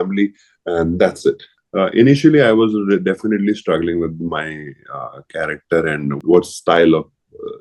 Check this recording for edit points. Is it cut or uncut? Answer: cut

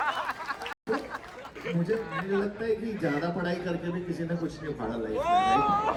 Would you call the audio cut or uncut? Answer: uncut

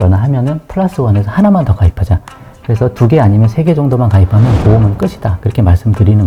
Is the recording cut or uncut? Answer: uncut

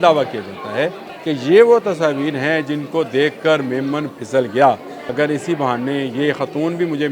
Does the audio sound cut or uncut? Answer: cut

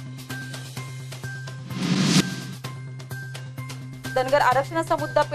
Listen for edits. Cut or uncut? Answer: cut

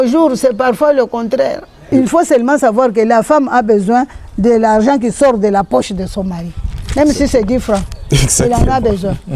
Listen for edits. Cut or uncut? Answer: cut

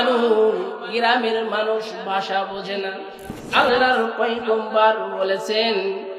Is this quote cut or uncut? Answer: cut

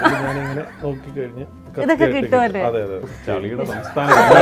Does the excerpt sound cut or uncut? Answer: cut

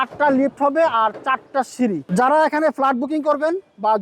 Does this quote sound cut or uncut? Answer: cut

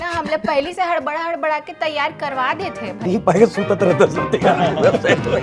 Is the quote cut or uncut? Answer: uncut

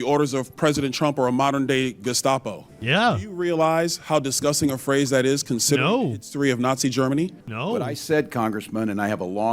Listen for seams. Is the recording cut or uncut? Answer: cut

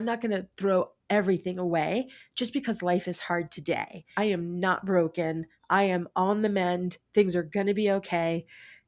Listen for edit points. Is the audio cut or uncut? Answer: cut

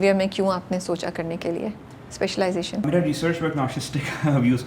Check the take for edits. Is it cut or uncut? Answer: uncut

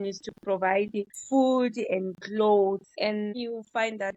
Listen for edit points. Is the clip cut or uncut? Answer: cut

